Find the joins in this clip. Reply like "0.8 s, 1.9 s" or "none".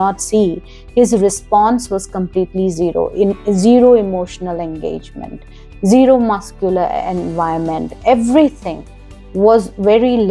none